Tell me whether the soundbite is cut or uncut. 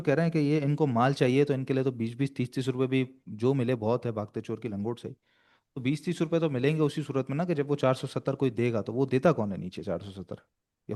uncut